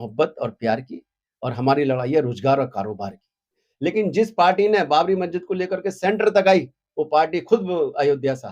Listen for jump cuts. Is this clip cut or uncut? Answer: cut